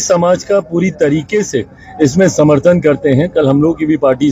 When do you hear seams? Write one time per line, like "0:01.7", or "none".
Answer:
none